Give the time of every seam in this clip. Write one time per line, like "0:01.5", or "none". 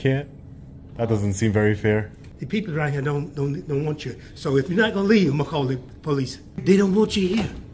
0:02.2
0:06.6